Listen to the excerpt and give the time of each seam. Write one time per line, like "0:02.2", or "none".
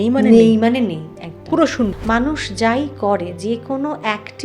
0:02.0